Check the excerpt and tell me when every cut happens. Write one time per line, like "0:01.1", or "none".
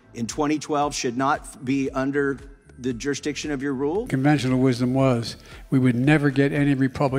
0:04.1